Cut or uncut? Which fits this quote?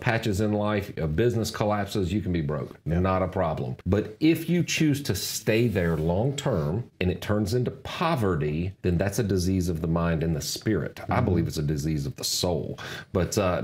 cut